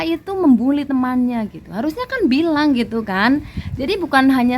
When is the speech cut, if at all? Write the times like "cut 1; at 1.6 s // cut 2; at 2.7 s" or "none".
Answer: none